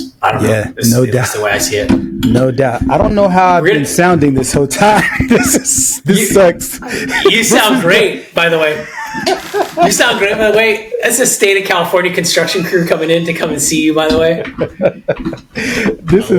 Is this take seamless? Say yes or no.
yes